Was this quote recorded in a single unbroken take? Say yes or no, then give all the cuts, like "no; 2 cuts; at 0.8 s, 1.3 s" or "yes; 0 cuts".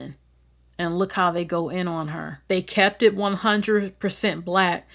no; 1 cut; at 2.3 s